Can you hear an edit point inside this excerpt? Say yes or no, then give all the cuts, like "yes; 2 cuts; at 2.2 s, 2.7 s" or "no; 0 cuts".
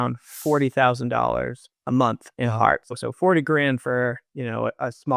yes; 1 cut; at 3.0 s